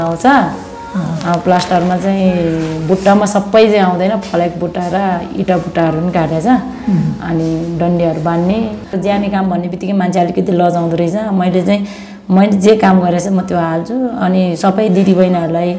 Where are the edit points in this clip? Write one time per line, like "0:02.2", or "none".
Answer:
0:08.9